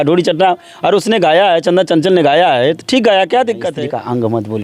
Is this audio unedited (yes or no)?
no